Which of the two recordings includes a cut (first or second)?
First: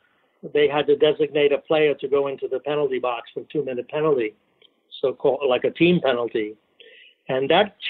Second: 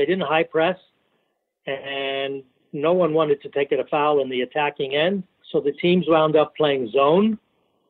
second